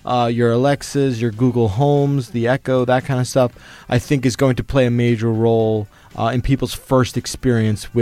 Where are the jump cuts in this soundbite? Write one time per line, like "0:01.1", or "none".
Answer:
none